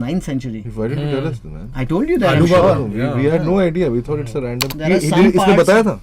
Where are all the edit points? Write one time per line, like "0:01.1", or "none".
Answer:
0:04.6